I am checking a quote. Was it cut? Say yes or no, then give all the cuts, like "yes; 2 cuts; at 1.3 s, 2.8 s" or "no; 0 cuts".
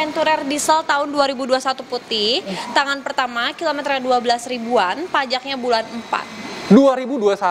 no; 0 cuts